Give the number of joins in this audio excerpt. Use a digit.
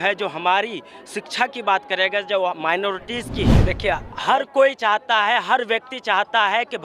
1